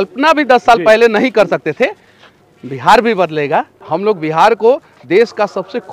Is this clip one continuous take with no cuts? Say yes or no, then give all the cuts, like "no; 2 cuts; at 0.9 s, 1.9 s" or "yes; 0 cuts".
no; 1 cut; at 3.9 s